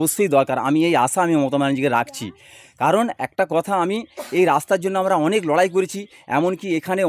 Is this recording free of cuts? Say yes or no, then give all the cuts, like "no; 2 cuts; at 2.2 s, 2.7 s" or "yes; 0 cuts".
yes; 0 cuts